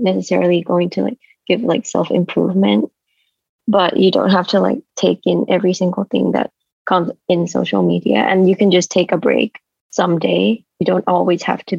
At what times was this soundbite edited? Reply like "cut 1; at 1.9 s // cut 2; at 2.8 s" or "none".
none